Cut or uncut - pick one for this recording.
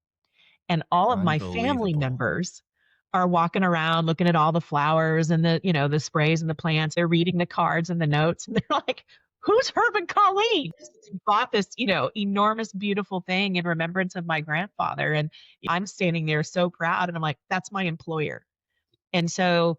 cut